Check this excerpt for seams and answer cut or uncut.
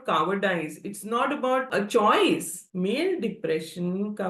cut